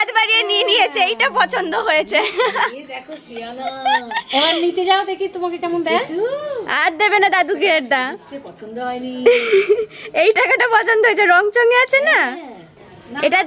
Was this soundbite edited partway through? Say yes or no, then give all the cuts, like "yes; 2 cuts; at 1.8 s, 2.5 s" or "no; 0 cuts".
no; 0 cuts